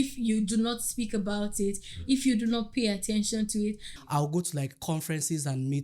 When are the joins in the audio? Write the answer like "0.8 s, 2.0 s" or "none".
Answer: 3.9 s